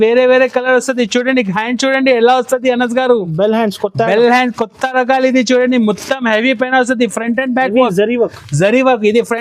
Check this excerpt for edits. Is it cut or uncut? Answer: uncut